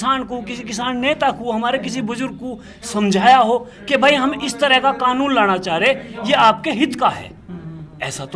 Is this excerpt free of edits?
yes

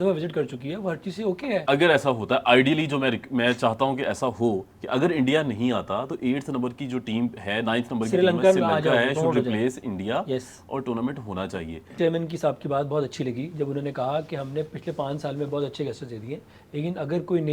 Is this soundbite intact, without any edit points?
no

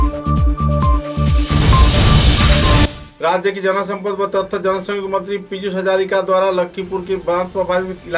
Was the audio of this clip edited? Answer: no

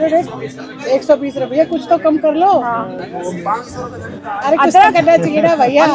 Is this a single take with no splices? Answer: yes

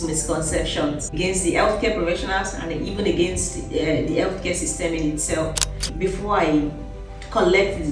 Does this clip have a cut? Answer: yes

